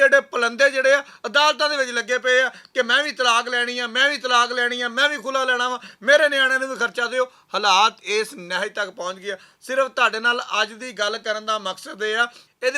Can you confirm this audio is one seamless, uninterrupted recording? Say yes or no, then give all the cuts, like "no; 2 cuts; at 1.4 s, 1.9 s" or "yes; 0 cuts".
yes; 0 cuts